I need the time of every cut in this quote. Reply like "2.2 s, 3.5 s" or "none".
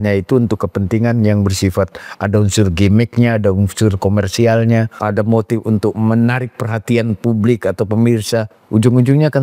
5.0 s, 8.6 s